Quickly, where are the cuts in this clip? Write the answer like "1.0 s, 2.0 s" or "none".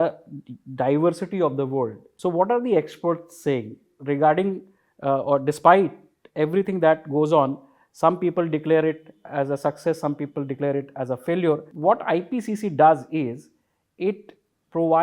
2.0 s, 11.7 s